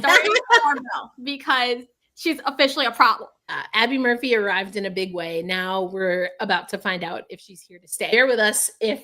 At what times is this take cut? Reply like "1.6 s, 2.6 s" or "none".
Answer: 3.6 s, 8.1 s